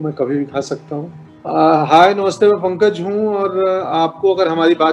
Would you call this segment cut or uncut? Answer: cut